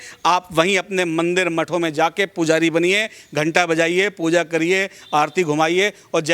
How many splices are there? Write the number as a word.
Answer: zero